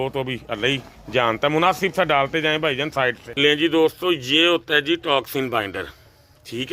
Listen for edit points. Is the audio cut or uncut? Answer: cut